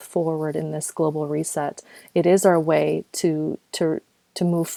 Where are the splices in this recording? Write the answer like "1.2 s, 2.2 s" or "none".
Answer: none